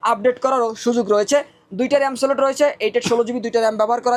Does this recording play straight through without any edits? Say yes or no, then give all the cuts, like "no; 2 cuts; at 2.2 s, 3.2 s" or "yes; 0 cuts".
yes; 0 cuts